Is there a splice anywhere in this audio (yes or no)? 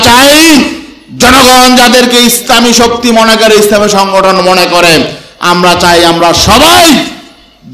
no